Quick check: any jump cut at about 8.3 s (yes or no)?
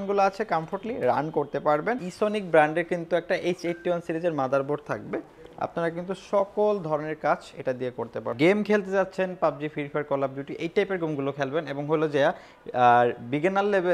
yes